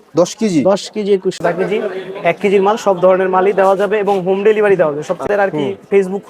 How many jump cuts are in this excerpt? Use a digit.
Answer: 2